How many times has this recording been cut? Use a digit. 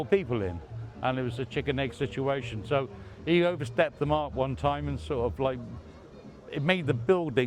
0